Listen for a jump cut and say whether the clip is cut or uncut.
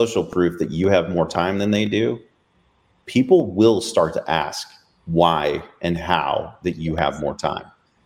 uncut